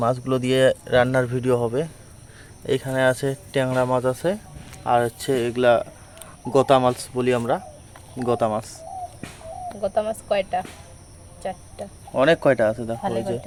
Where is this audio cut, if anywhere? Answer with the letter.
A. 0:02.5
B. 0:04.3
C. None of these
C